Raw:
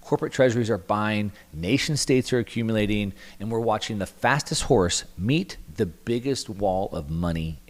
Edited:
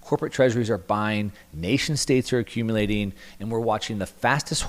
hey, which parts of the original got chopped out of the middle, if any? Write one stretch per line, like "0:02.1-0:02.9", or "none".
none